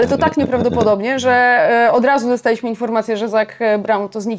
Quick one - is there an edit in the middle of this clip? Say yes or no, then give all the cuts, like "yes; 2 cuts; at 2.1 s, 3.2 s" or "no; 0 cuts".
no; 0 cuts